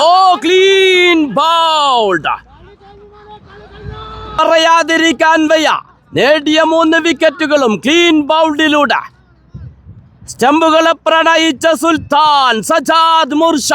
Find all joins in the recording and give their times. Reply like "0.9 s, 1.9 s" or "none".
4.4 s